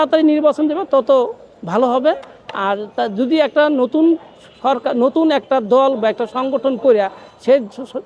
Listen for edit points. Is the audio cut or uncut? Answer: uncut